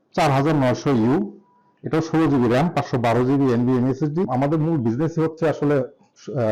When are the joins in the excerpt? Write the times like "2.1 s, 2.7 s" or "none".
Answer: 4.3 s